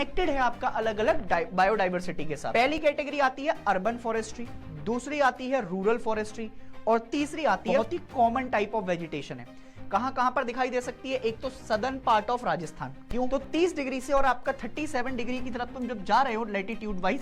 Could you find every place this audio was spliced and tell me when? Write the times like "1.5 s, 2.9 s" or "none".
2.4 s, 7.8 s, 13.3 s